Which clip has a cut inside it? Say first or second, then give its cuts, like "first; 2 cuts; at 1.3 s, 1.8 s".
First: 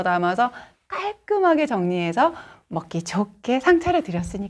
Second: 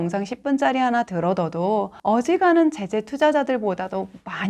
second; 1 cut; at 1.9 s